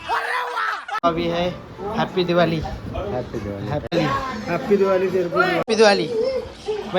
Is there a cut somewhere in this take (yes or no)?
yes